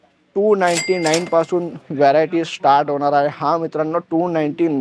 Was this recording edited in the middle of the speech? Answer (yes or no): no